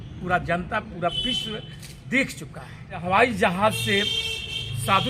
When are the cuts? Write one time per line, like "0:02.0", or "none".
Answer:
0:03.0